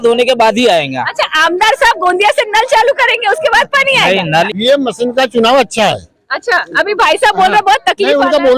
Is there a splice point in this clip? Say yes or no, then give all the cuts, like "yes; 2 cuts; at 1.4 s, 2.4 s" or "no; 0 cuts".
yes; 1 cut; at 4.2 s